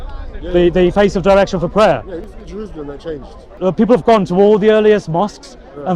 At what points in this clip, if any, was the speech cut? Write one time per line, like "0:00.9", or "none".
0:03.5